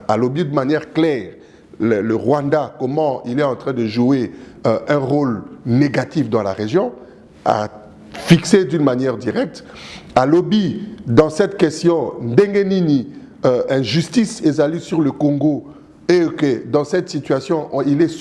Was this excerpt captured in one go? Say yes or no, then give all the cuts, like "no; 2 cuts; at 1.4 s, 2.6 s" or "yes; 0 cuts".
yes; 0 cuts